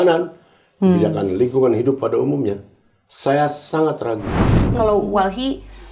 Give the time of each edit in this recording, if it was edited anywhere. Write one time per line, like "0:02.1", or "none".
0:04.7